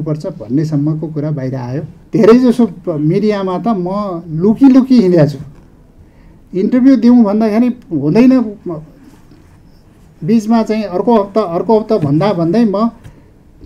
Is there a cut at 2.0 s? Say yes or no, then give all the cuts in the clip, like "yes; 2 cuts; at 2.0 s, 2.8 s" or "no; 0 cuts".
yes; 1 cut; at 2.0 s